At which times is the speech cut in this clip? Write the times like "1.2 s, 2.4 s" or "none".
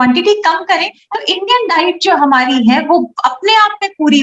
0.9 s